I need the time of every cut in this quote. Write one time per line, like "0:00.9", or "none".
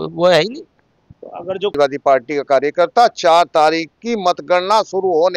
0:01.7